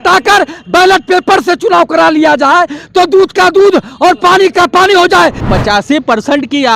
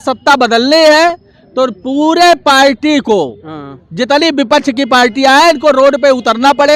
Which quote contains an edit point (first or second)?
first